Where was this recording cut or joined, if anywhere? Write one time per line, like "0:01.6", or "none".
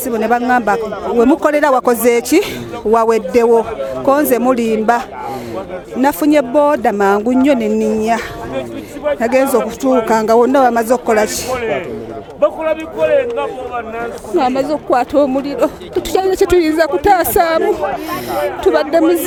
none